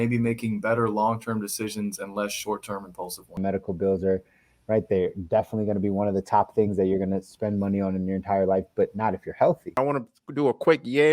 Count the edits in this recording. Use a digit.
2